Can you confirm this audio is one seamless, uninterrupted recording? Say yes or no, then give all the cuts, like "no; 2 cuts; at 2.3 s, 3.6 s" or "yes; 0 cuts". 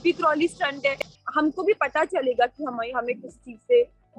no; 1 cut; at 1.1 s